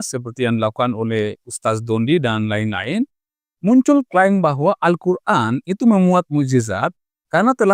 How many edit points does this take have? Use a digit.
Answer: 0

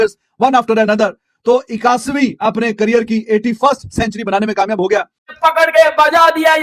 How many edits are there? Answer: 1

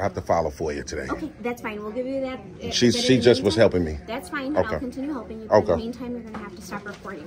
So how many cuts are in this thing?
0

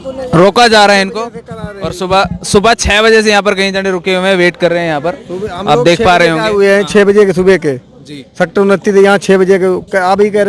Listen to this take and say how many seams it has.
0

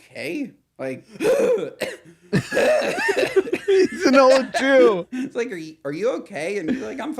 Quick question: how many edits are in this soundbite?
1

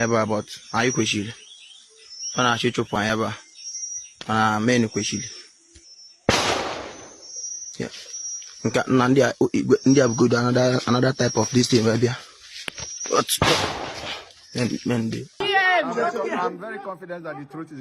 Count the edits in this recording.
1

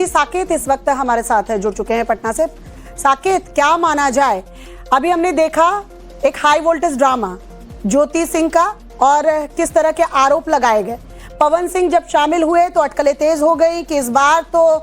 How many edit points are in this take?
1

